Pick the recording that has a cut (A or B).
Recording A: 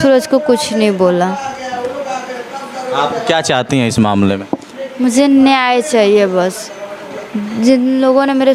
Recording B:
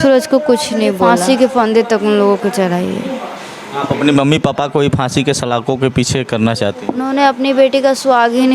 B